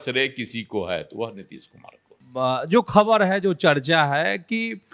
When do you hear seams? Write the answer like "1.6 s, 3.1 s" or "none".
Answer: 2.6 s